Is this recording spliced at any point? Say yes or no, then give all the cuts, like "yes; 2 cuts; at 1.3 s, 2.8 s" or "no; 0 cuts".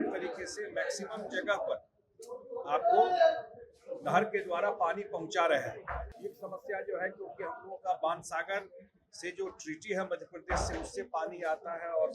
yes; 1 cut; at 6.1 s